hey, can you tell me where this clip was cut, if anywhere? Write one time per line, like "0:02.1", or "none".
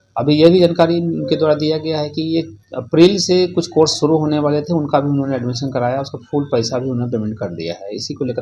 none